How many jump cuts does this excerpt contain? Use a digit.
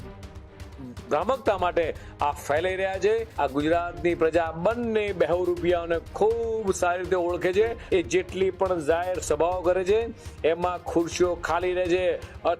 2